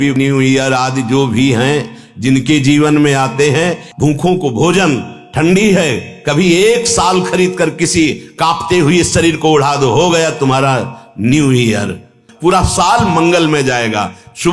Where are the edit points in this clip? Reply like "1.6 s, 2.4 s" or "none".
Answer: 3.8 s, 12.3 s